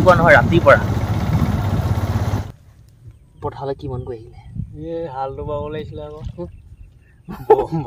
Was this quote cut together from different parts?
yes; 1 cut; at 2.4 s

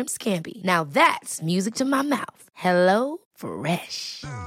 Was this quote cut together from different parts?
no; 0 cuts

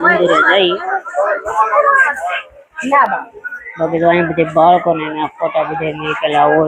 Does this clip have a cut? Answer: no; 0 cuts

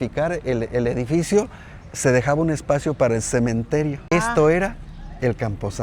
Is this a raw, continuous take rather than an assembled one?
no; 1 cut; at 4.0 s

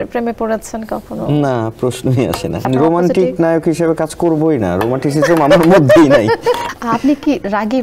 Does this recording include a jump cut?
yes; 2 cuts; at 2.7 s, 6.7 s

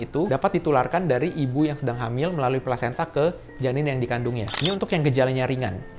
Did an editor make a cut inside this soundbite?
yes; 1 cut; at 4.6 s

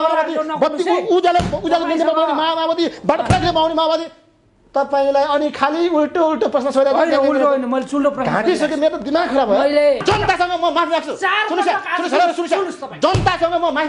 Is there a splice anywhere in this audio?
yes; 1 cut; at 10.0 s

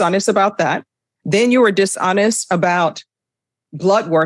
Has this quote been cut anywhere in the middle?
no; 0 cuts

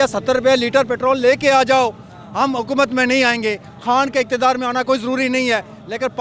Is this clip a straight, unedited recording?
yes; 0 cuts

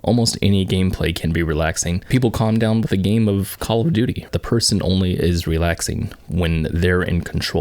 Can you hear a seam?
yes; 2 cuts; at 2.0 s, 4.3 s

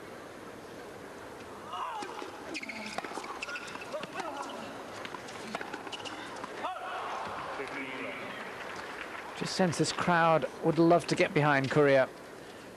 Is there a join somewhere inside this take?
yes; 1 cut; at 11.5 s

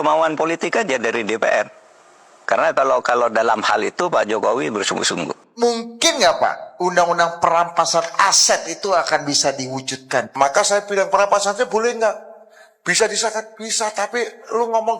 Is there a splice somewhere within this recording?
yes; 1 cut; at 5.5 s

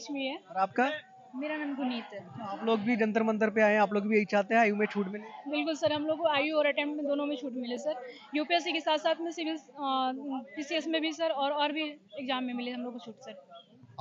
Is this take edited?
no; 0 cuts

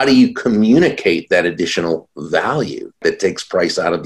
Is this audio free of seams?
no; 1 cut; at 3.0 s

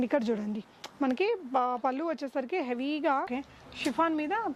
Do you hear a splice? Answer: yes; 1 cut; at 3.3 s

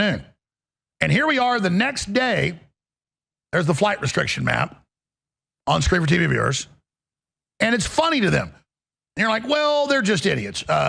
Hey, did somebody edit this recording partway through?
no; 0 cuts

